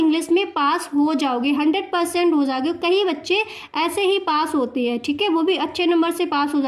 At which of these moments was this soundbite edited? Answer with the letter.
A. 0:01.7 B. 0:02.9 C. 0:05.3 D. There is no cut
D